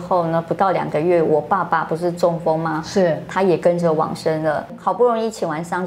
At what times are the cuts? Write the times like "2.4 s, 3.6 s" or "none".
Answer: 4.6 s